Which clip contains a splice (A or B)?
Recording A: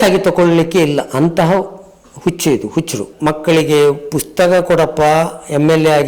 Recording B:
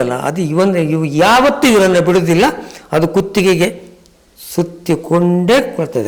A